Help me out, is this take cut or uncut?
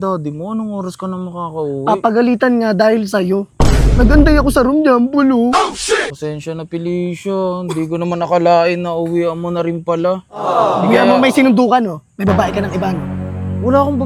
uncut